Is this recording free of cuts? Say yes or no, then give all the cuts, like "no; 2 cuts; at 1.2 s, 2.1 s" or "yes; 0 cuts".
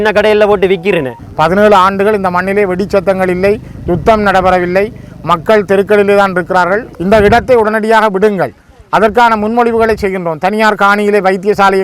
no; 2 cuts; at 1.2 s, 6.9 s